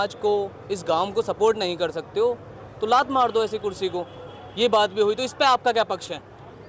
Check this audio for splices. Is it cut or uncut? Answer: uncut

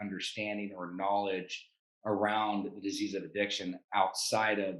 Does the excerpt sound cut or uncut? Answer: uncut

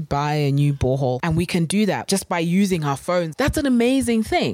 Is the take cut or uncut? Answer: cut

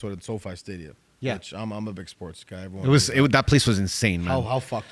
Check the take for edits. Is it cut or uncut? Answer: uncut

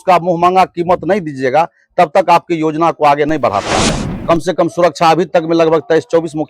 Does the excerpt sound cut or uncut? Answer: cut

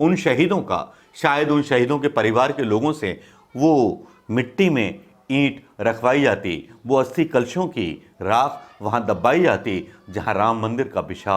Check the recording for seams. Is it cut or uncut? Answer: uncut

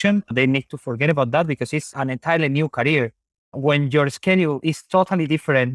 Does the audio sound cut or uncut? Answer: uncut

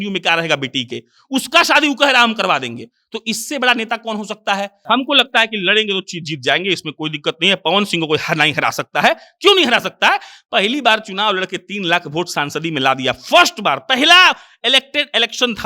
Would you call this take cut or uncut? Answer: cut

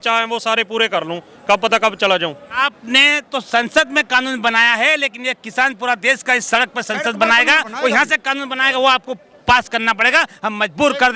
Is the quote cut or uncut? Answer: cut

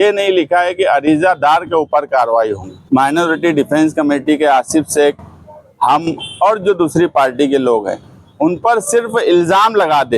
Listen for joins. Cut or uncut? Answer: cut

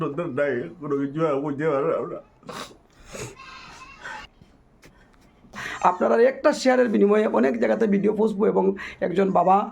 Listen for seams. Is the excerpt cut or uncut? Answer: cut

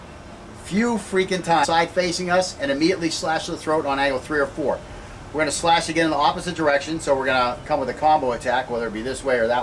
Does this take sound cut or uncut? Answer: uncut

